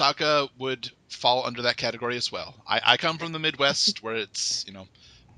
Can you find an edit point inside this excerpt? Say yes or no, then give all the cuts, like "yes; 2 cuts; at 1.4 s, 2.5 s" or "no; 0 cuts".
yes; 1 cut; at 1.4 s